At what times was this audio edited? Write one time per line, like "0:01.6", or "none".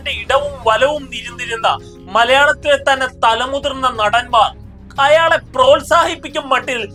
none

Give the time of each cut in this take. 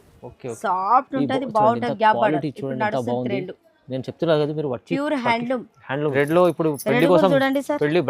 0:06.1

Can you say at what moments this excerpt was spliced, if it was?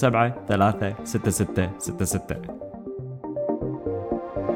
0:02.3

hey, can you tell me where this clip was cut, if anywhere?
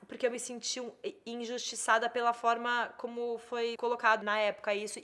0:04.1

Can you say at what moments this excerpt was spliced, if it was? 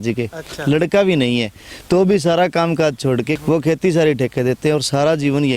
0:03.3

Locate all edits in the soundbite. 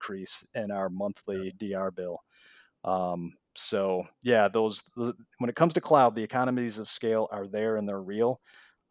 none

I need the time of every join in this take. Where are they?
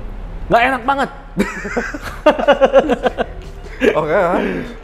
none

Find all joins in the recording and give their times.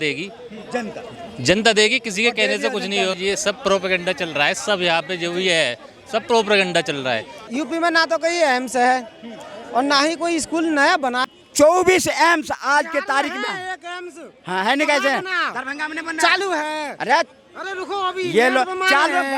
0:03.1
0:07.4
0:11.2

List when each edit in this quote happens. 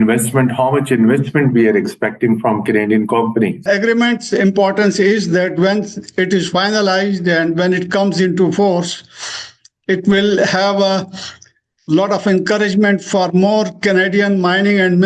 0:03.6

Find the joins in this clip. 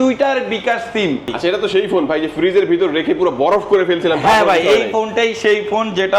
0:01.3

